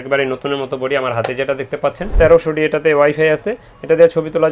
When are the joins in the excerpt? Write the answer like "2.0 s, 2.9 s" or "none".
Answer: 2.1 s